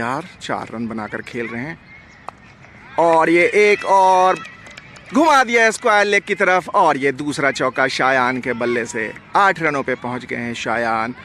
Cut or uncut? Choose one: uncut